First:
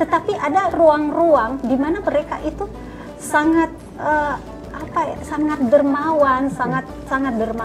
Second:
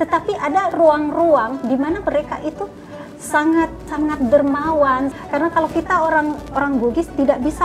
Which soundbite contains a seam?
second; 2 cuts; at 3.8 s, 5.2 s

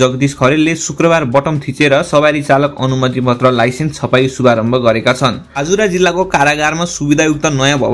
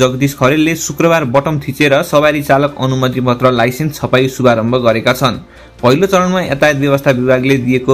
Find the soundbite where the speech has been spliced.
first; 1 cut; at 5.5 s

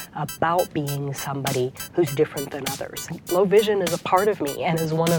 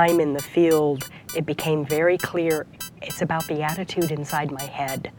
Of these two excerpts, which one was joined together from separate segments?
first; 1 cut; at 3.0 s

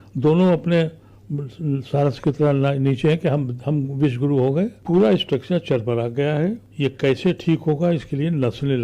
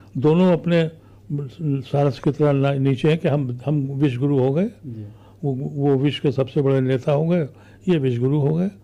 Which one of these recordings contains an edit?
first; 2 cuts; at 4.8 s, 6.7 s

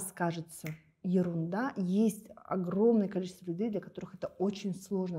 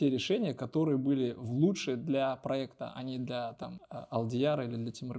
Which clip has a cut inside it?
second; 1 cut; at 3.8 s

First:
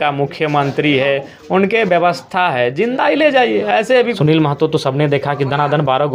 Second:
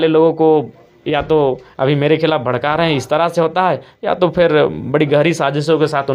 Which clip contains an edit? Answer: first; 1 cut; at 4.1 s

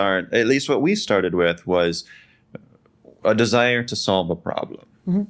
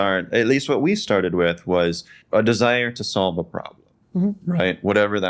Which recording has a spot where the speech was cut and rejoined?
second; 1 cut; at 2.1 s

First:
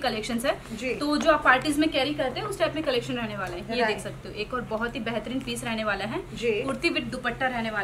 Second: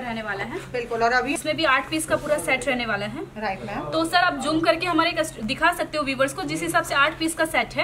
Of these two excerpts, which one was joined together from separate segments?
second; 1 cut; at 1.3 s

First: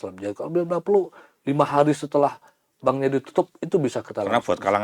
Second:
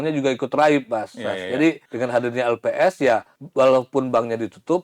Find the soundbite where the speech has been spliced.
second; 2 cuts; at 1.9 s, 3.4 s

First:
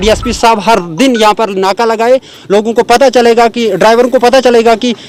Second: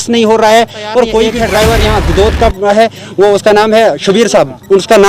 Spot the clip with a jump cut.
second; 1 cut; at 1.4 s

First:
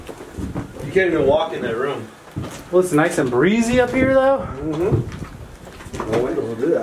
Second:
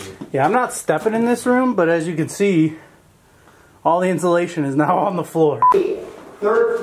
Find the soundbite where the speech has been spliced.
second; 1 cut; at 5.7 s

